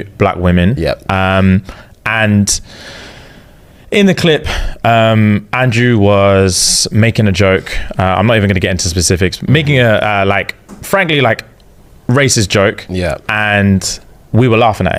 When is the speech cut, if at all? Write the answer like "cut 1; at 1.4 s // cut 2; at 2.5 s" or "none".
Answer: none